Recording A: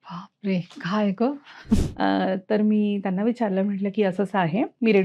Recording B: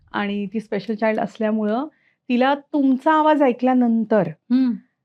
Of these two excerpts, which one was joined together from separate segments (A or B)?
A